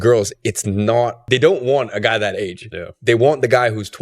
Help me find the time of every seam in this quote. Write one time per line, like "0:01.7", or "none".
0:01.2